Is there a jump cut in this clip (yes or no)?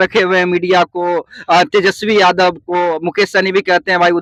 no